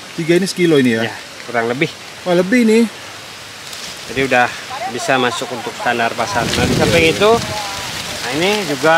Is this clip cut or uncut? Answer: uncut